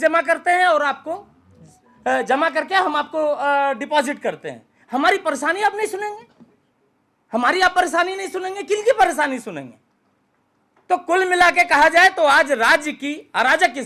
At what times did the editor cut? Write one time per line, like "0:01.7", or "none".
none